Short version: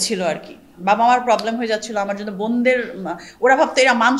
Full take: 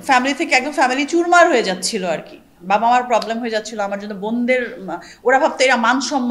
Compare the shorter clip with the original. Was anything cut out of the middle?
no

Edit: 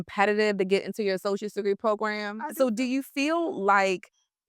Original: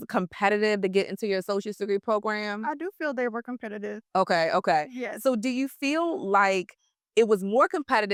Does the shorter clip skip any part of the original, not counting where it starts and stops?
yes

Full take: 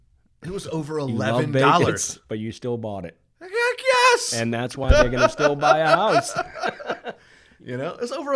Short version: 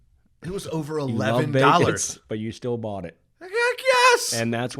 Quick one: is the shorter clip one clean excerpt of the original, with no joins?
yes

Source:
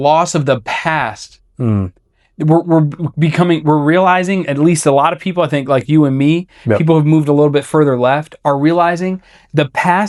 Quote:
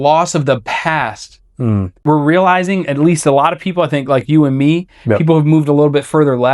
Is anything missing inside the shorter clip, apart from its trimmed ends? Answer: yes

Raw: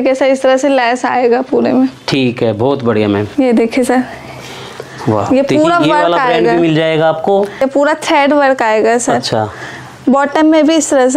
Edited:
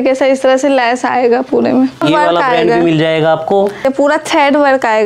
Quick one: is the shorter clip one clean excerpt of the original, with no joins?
no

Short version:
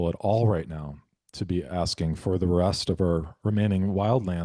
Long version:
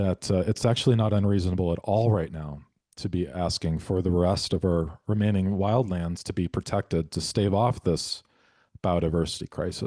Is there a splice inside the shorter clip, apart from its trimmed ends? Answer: no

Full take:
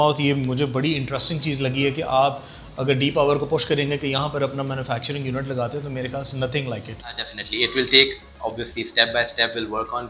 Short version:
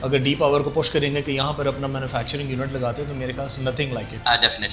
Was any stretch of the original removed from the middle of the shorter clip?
no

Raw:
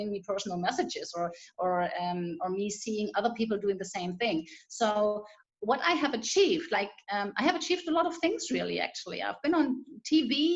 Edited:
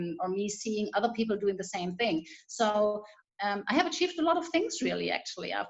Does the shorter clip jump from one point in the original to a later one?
yes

